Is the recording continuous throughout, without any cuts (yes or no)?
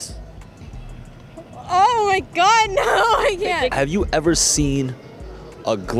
no